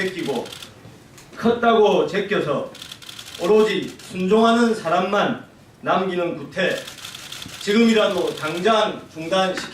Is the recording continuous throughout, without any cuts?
no; 1 cut; at 1.9 s

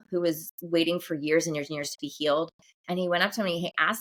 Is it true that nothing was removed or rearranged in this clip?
yes; 0 cuts

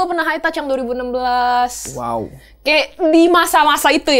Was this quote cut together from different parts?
no; 0 cuts

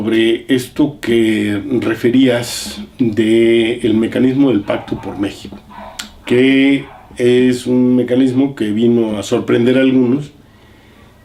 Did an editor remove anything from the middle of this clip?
no; 0 cuts

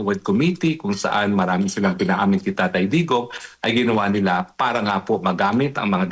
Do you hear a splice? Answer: no; 0 cuts

